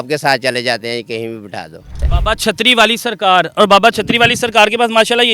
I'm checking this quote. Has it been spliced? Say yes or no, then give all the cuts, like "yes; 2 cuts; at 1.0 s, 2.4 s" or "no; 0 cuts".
yes; 1 cut; at 2.1 s